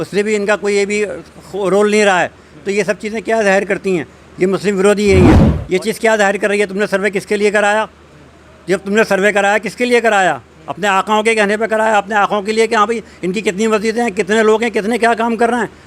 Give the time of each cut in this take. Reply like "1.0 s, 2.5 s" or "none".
5.5 s